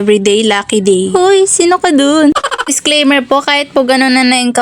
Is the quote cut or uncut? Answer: cut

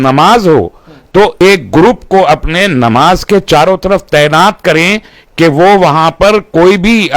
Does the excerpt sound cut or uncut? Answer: cut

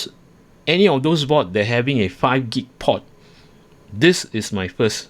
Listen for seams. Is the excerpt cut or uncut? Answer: uncut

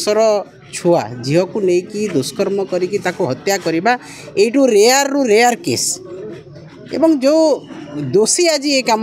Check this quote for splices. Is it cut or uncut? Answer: uncut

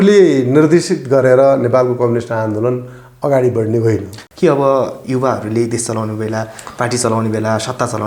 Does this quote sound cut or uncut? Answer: cut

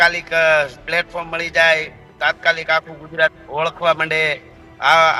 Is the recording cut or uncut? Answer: uncut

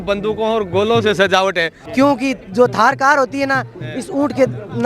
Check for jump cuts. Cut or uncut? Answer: cut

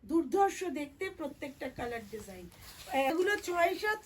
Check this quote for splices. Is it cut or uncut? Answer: cut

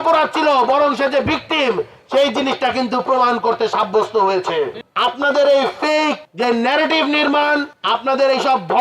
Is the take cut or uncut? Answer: cut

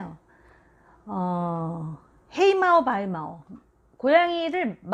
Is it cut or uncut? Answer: uncut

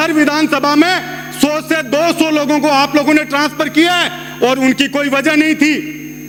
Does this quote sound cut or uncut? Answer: uncut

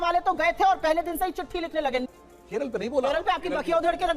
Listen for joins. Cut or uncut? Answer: cut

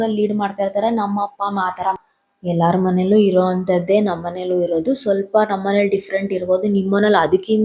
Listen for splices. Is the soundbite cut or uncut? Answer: cut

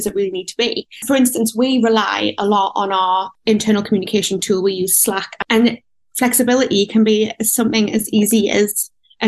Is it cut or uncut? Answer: uncut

